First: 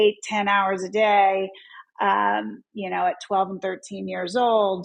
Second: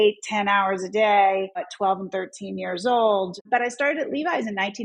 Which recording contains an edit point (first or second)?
second